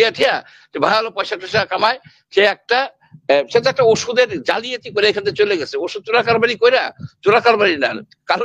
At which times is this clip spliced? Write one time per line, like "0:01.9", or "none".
none